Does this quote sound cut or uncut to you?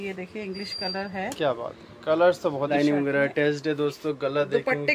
cut